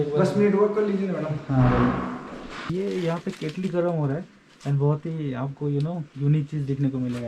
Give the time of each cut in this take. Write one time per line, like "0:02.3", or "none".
0:02.7